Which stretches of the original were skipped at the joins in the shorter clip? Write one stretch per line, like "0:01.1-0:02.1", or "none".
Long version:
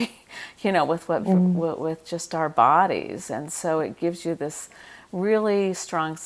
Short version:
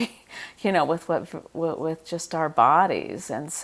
none